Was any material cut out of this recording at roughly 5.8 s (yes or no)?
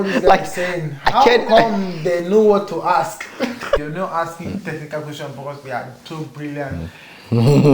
no